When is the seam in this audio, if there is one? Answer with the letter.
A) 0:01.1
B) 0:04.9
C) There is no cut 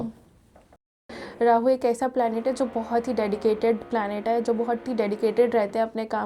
A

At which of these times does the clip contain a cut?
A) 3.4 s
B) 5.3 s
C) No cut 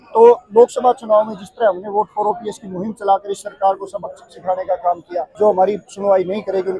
B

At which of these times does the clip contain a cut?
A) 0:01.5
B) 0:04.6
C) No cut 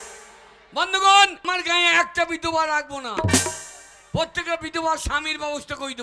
A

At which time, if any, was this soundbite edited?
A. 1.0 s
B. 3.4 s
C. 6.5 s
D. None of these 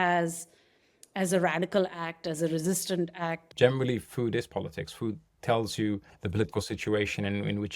B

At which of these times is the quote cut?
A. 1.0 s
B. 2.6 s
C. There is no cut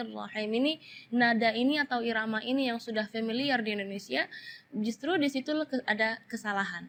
C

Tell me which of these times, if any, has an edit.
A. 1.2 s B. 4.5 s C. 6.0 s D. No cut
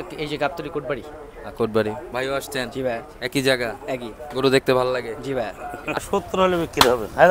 C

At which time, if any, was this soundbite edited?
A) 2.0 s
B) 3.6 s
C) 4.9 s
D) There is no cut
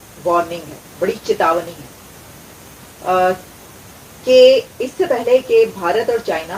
D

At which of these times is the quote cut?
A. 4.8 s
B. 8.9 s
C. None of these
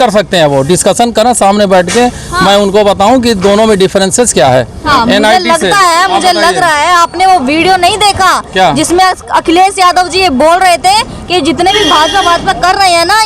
A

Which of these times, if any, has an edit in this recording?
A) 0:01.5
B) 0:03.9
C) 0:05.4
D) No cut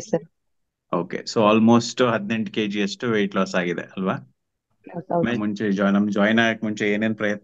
C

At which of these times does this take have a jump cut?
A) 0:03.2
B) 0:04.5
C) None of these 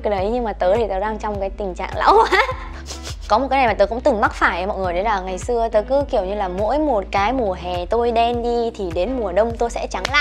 A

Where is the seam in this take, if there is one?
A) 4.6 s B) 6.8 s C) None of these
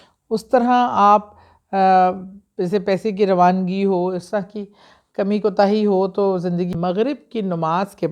B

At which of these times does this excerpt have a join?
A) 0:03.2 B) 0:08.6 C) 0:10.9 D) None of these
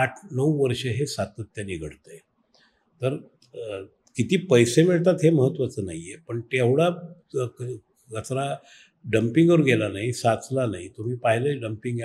D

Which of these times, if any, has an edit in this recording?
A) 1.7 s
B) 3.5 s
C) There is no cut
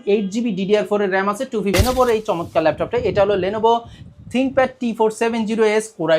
A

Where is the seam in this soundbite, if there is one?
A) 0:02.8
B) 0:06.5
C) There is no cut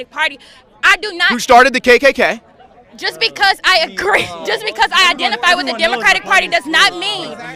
C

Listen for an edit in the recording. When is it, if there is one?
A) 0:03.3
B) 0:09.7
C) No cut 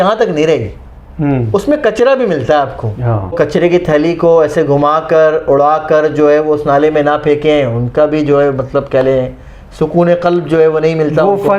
A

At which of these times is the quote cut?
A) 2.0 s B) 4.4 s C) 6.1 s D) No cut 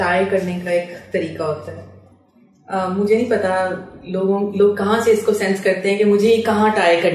D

